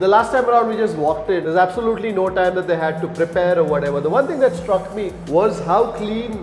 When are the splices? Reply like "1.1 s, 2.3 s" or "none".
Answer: 1.4 s